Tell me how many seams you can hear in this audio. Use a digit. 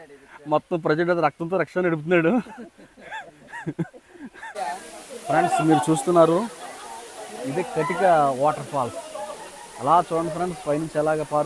1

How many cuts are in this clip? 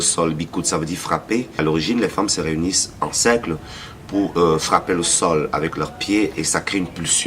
1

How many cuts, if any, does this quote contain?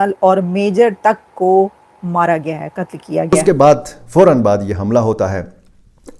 1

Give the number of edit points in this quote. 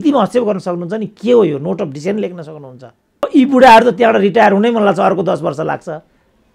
1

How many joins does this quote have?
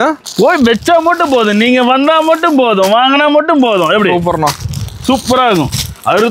0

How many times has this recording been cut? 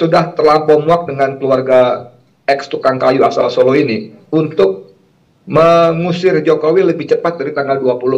1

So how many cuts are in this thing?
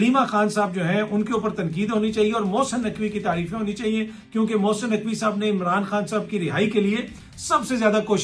0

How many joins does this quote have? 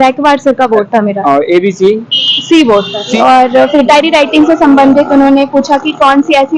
1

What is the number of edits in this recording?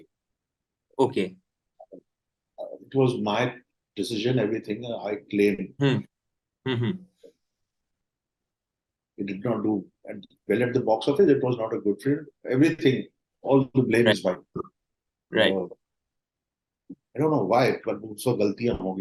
0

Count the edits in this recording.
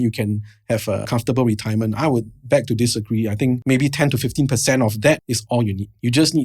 3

